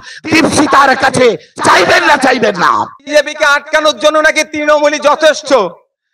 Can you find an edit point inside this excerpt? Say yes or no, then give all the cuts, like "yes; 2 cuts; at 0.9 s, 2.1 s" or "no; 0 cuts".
yes; 1 cut; at 3.1 s